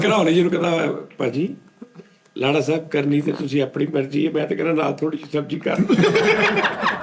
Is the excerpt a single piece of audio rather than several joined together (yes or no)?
yes